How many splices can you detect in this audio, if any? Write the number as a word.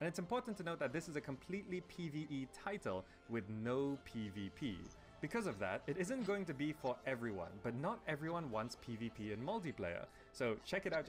one